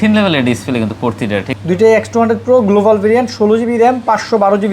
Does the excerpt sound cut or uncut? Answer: cut